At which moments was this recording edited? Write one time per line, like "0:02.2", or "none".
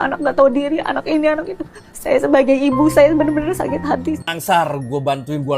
0:04.3